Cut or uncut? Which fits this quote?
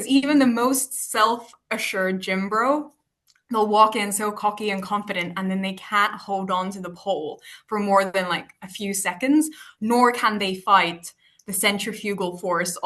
uncut